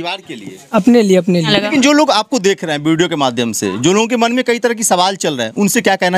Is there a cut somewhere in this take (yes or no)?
yes